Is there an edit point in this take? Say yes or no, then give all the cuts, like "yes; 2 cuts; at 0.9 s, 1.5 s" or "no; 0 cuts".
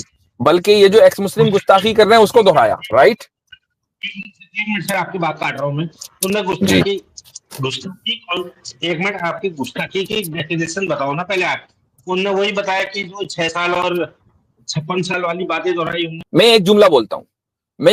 yes; 1 cut; at 16.2 s